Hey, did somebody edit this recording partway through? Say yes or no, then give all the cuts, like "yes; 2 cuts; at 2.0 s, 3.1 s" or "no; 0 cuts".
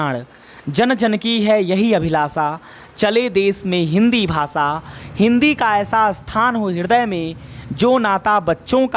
no; 0 cuts